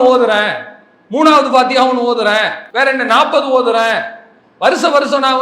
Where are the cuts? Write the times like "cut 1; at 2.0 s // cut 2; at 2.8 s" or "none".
cut 1; at 2.6 s